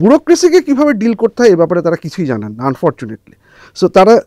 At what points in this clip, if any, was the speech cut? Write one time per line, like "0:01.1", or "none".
none

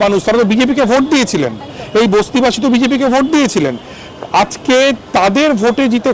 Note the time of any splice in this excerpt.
none

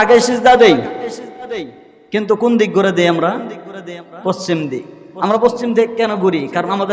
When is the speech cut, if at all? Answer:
none

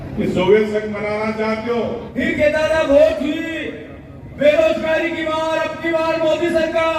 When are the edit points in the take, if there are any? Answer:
0:02.1

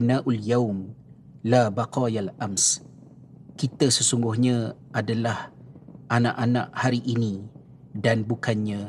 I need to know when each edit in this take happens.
none

